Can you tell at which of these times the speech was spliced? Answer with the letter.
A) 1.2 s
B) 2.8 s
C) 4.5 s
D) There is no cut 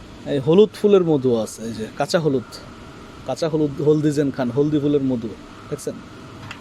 D